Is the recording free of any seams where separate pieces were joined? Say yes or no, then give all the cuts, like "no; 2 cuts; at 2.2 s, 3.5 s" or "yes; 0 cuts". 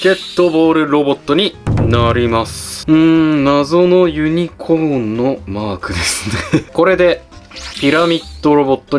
no; 2 cuts; at 2.7 s, 6.7 s